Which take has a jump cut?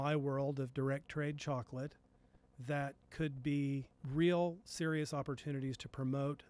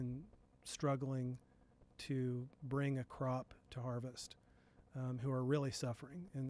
first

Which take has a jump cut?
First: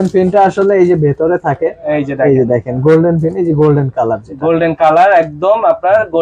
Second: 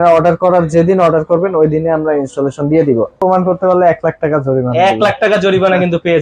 second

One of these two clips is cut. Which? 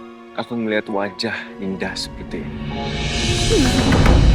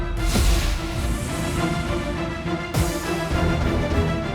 second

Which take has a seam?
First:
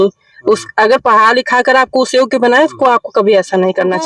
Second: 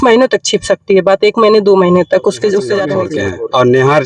second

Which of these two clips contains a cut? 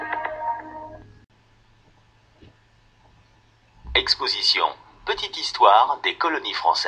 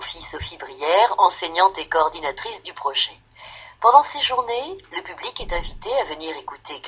first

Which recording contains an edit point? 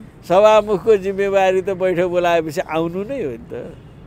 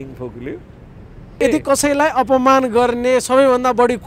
second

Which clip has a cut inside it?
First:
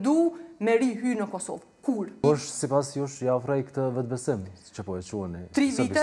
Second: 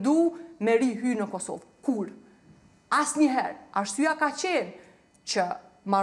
first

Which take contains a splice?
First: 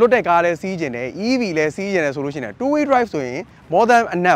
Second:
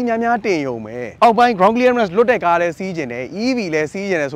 second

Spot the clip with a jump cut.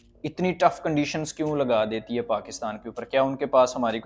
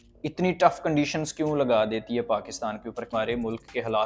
second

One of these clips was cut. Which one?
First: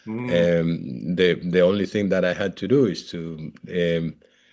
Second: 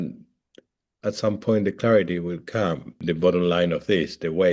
second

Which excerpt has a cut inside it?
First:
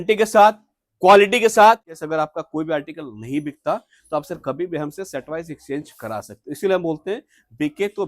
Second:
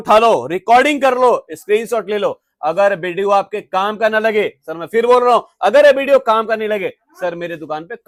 first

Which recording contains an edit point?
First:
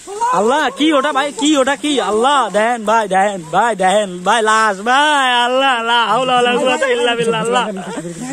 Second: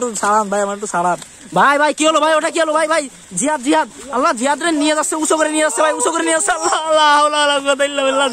second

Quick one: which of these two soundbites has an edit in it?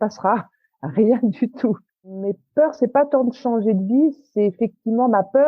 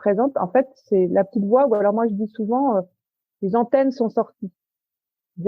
first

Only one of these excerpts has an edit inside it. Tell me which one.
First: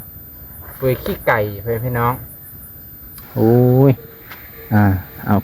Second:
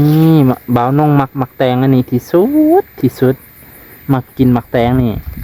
first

